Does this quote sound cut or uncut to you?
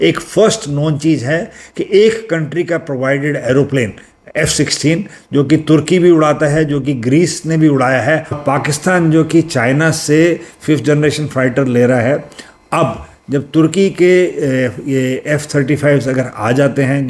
cut